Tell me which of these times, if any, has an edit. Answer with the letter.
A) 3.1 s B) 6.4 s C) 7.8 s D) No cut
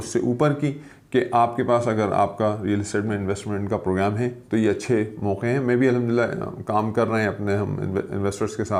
D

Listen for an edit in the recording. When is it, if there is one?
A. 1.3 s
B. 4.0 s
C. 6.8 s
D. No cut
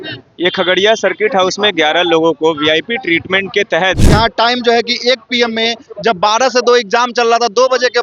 B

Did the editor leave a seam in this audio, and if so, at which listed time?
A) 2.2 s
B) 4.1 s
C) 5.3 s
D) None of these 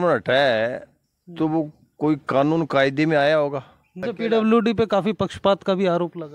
B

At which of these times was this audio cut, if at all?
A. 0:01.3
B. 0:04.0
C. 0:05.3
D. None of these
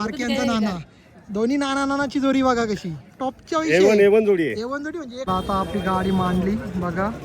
C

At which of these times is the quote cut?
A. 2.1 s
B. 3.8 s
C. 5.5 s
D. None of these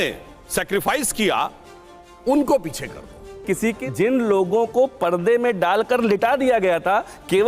B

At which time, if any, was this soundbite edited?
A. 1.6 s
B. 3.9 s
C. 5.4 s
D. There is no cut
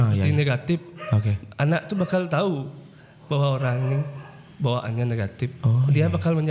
D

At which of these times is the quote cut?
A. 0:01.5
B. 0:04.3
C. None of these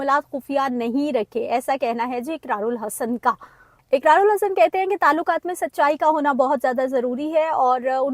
C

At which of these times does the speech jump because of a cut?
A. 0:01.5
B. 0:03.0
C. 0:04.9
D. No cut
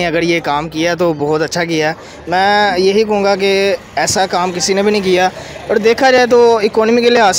D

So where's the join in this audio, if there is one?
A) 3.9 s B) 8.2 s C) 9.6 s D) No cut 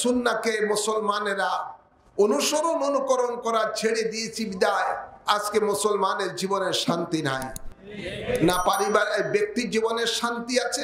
D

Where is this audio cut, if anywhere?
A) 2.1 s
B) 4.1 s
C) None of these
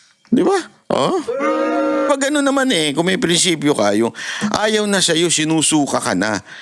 A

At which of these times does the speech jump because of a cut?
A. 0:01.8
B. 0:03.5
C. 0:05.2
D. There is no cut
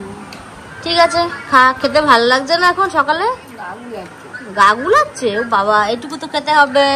D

